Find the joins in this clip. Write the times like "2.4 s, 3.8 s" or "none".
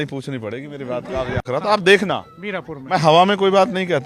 1.4 s